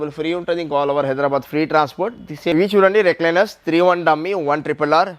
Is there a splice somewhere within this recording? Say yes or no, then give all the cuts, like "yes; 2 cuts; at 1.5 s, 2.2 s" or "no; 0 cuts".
yes; 1 cut; at 2.5 s